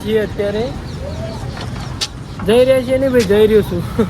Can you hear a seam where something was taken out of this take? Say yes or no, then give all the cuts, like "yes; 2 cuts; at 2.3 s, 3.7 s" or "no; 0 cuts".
no; 0 cuts